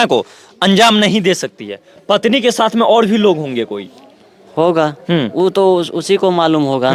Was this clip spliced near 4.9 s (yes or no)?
no